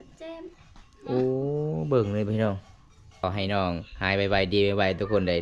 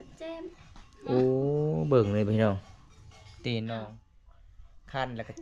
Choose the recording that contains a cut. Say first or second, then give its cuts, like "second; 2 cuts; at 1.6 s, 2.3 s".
first; 1 cut; at 3.2 s